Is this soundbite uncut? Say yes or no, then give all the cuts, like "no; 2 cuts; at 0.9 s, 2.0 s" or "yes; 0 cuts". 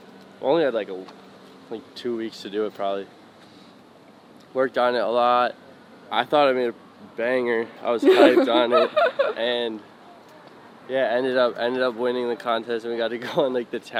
yes; 0 cuts